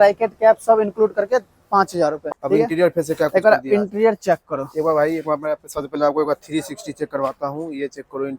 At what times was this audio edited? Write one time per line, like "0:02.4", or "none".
0:02.2